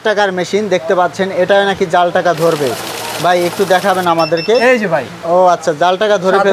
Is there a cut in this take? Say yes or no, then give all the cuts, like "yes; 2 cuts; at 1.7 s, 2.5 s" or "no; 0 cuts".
no; 0 cuts